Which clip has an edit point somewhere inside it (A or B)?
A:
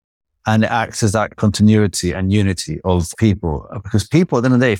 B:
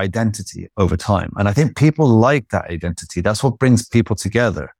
A